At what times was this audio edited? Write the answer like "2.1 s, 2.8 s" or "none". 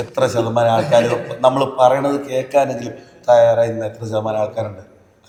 none